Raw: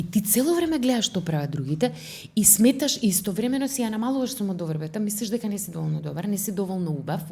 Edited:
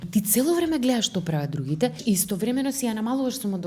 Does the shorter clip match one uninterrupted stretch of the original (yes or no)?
no